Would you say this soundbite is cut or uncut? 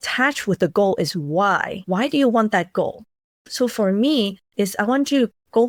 uncut